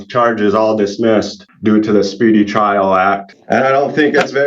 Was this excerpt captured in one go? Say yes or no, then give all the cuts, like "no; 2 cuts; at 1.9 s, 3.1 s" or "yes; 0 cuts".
no; 2 cuts; at 1.4 s, 3.3 s